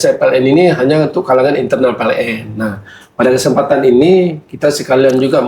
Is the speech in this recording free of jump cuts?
yes; 0 cuts

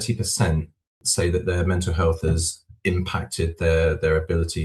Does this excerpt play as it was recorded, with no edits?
no; 1 cut; at 1.0 s

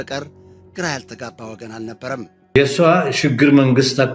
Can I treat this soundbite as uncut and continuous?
no; 1 cut; at 2.5 s

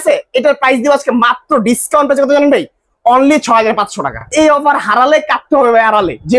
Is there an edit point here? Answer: yes; 1 cut; at 4.3 s

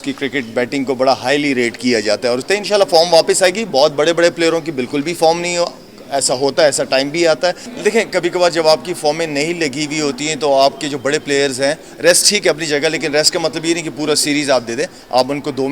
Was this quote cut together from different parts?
yes; 2 cuts; at 2.4 s, 7.7 s

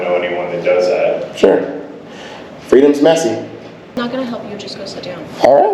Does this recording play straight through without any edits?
no; 1 cut; at 4.0 s

